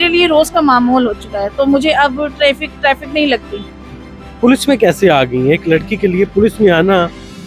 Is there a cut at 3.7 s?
no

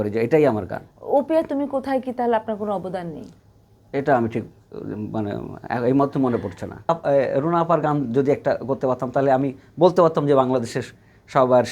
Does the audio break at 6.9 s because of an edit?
yes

